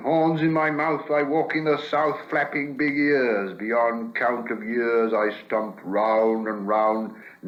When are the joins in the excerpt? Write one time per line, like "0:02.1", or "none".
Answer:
none